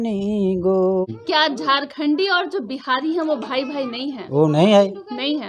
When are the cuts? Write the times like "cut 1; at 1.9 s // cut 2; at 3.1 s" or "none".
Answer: cut 1; at 1.1 s